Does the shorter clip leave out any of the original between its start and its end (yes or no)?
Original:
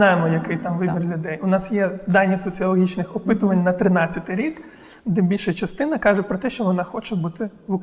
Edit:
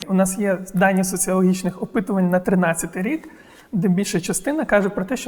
no